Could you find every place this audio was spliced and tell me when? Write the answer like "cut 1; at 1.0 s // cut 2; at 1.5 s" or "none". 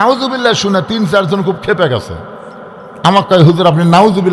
none

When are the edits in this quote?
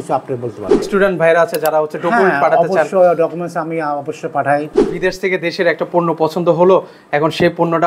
cut 1; at 0.9 s // cut 2; at 4.8 s

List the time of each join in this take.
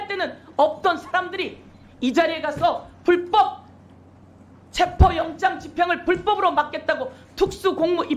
none

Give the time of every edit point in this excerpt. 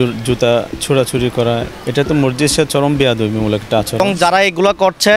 cut 1; at 1.8 s // cut 2; at 4.0 s

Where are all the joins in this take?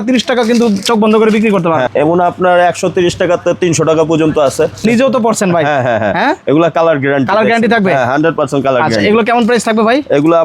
cut 1; at 1.9 s // cut 2; at 4.8 s

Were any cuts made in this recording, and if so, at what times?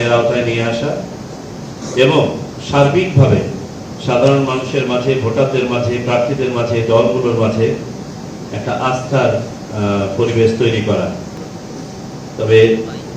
cut 1; at 11.4 s

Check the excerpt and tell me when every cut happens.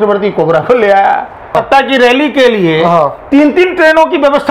cut 1; at 1.5 s

